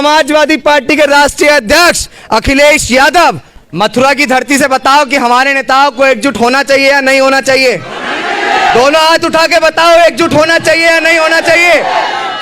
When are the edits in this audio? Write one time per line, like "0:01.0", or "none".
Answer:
0:03.5